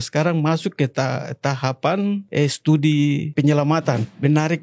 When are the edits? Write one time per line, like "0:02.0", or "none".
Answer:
0:02.3
0:03.6